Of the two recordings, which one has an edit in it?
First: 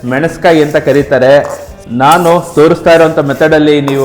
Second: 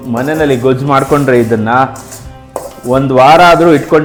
first; 1 cut; at 1.7 s

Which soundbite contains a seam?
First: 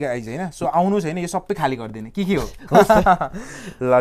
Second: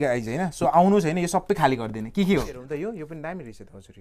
second; 1 cut; at 2.6 s

